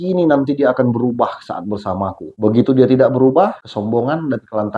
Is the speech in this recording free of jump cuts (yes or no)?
no